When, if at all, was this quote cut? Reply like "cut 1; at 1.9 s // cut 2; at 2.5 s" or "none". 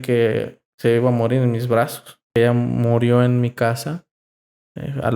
cut 1; at 2.3 s